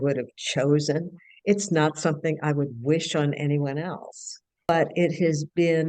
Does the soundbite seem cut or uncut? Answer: cut